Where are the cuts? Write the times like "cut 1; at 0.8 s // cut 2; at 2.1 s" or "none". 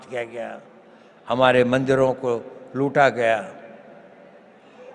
none